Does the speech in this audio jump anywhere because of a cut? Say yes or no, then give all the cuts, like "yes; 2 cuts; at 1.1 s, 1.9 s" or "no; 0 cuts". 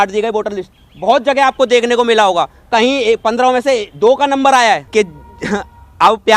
yes; 1 cut; at 4.8 s